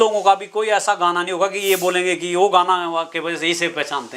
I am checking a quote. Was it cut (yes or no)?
no